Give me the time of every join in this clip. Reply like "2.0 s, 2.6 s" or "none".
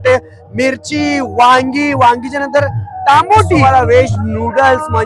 3.6 s